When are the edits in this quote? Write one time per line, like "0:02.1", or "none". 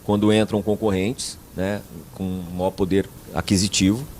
0:03.2

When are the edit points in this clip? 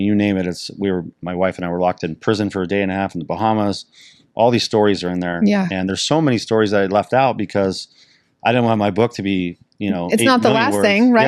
none

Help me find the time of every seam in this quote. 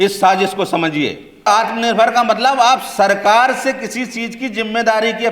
0:01.5

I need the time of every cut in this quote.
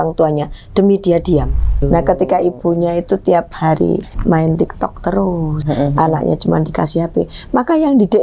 0:01.8
0:04.1
0:05.6

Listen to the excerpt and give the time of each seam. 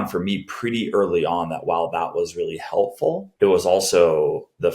0:03.3

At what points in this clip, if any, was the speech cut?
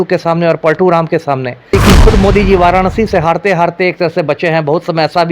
0:01.7

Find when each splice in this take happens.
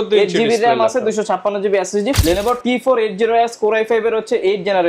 0:02.2

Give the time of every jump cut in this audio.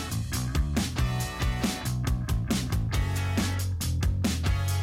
0:02.1

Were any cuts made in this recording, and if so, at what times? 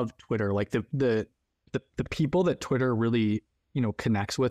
none

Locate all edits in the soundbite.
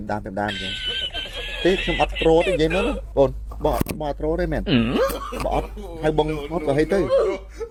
none

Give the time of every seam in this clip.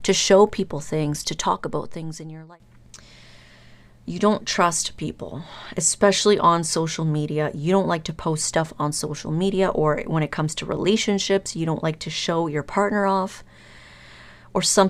0:02.2

